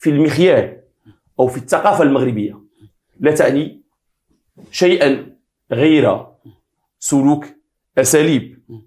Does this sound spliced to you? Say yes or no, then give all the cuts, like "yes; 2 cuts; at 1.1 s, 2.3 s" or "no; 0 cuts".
no; 0 cuts